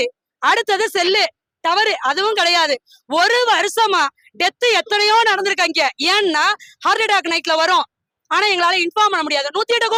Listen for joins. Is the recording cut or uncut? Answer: uncut